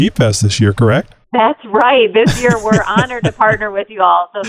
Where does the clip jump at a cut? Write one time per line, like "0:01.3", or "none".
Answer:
0:01.2